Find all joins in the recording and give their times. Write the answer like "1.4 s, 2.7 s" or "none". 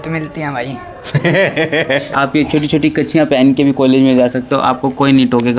2.1 s